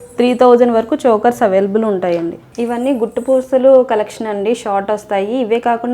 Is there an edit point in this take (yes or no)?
yes